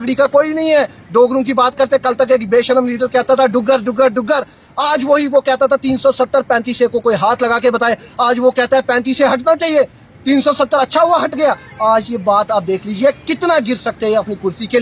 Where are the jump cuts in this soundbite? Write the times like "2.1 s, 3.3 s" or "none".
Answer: none

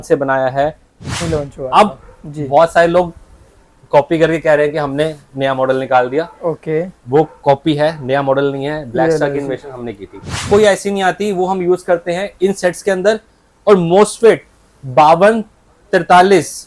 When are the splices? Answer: 1.1 s, 10.4 s

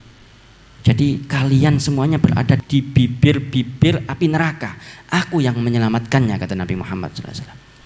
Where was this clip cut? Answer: 2.6 s

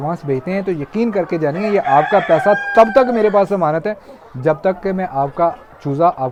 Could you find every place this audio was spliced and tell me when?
none

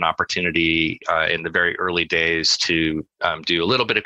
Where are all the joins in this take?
none

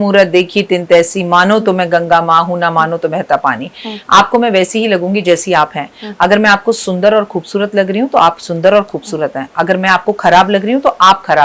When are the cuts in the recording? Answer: none

